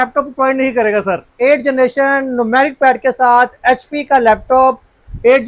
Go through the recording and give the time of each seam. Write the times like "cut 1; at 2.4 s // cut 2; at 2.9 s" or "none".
cut 1; at 1.3 s